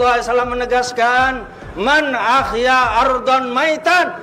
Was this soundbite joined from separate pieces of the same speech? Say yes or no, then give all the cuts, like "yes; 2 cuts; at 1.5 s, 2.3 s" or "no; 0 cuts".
no; 0 cuts